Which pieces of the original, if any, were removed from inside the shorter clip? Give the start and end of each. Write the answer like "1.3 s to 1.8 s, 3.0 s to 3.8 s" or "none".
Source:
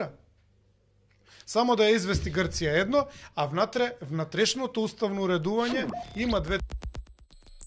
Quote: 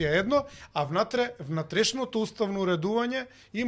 none